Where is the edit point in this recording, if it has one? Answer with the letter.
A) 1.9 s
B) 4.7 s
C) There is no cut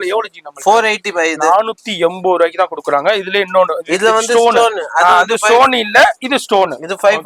C